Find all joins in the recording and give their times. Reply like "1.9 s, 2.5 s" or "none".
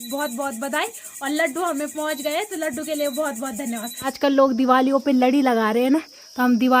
4.1 s